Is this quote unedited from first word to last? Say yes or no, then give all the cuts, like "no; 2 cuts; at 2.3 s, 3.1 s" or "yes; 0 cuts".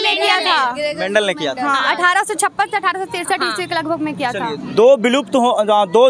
yes; 0 cuts